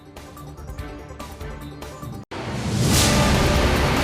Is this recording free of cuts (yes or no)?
no